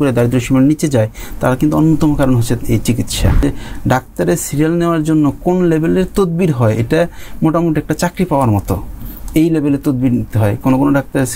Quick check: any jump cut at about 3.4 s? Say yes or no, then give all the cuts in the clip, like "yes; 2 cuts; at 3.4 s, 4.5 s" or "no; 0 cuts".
yes; 1 cut; at 3.4 s